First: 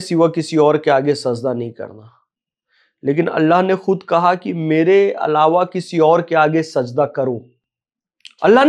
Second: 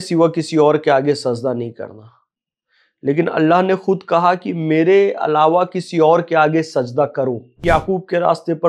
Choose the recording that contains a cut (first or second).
second